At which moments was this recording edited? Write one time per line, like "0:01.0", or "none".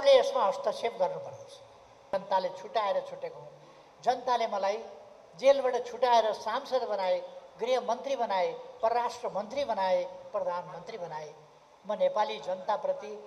0:02.1